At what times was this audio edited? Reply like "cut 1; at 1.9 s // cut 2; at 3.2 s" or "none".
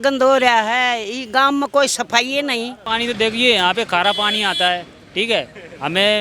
cut 1; at 2.8 s